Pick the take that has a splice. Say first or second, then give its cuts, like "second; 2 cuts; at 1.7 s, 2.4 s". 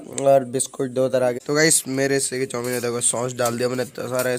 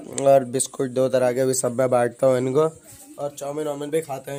first; 1 cut; at 1.4 s